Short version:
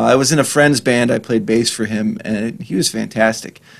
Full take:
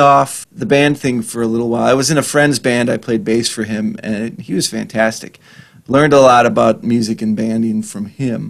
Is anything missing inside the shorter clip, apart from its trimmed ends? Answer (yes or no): no